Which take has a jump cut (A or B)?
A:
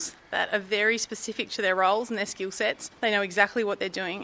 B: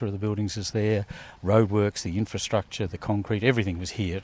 B